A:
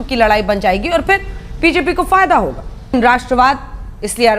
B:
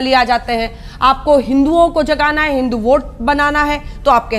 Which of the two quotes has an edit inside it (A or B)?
A